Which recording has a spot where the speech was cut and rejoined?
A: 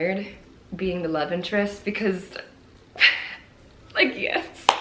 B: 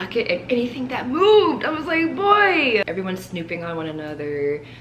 B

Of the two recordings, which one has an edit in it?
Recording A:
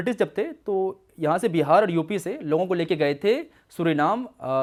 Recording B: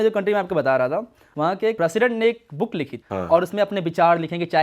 B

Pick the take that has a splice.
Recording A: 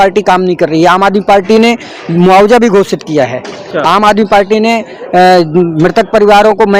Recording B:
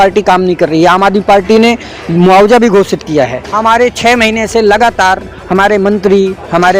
B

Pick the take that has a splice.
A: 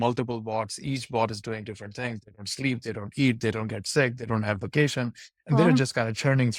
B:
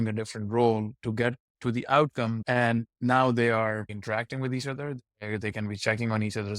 B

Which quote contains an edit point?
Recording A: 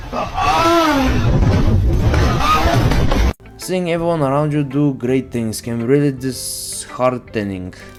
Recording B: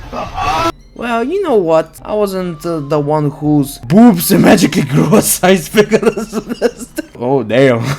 B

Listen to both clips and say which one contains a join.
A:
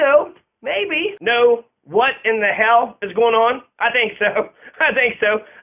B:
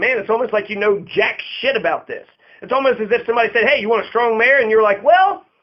A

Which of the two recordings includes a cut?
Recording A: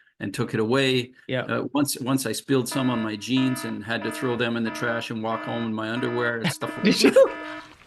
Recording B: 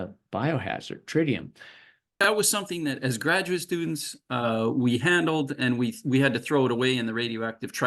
B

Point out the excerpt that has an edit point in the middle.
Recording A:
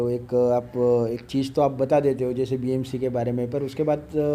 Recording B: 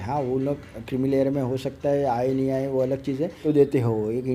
B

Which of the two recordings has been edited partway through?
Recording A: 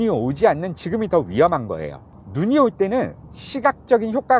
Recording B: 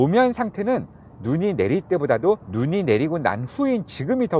B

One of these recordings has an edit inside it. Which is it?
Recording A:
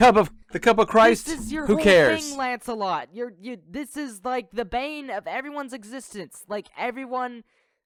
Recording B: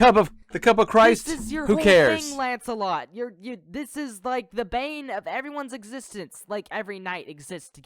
B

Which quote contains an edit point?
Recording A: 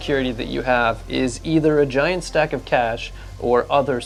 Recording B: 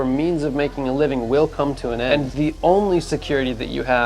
B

